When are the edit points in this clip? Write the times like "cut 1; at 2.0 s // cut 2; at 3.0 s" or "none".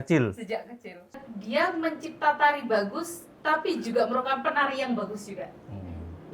cut 1; at 1.2 s